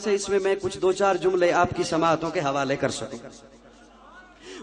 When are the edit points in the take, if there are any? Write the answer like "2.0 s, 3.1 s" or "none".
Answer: none